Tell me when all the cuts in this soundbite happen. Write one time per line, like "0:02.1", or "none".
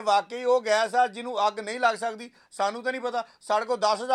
none